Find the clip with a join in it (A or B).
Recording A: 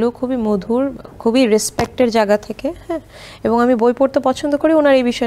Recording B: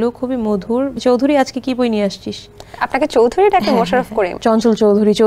B